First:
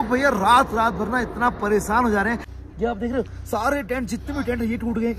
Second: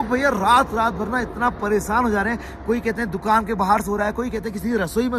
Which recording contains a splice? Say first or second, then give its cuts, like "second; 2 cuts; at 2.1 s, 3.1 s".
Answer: first; 1 cut; at 2.5 s